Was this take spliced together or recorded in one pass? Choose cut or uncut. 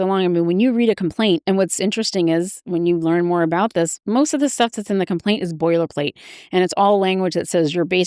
uncut